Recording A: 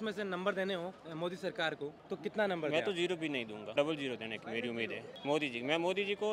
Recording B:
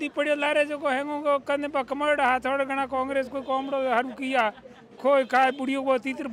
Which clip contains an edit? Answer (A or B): A